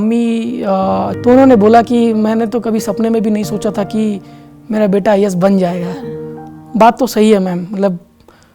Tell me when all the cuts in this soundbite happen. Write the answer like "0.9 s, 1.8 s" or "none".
1.1 s